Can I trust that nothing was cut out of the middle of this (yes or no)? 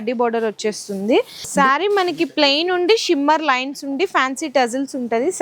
no